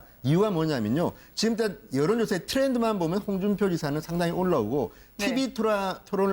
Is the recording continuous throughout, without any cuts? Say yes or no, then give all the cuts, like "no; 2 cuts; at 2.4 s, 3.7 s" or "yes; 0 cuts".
no; 1 cut; at 3.6 s